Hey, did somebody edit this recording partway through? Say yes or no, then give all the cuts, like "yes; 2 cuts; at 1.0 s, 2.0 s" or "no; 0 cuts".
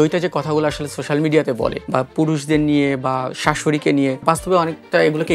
no; 0 cuts